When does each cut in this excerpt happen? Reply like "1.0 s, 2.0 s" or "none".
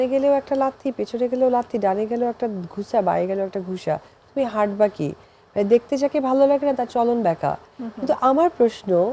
none